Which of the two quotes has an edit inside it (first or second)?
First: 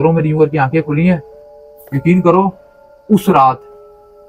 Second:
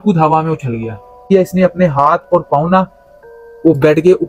second